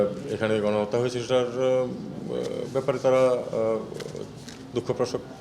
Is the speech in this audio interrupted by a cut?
no; 0 cuts

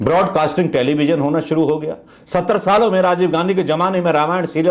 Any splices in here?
no; 0 cuts

